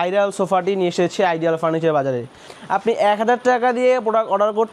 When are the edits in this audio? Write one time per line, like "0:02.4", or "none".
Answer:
0:02.5